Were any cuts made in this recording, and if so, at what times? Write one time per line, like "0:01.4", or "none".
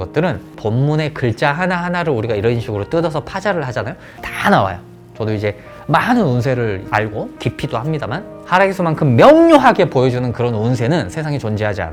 none